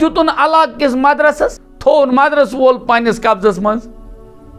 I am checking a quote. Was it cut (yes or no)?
yes